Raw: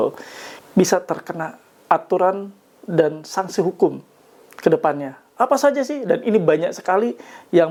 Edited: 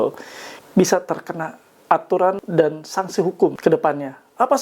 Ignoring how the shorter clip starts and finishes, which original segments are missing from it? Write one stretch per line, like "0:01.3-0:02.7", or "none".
0:02.4-0:02.8
0:04.0-0:04.6